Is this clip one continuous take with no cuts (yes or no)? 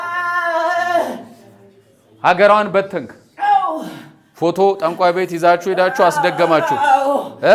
yes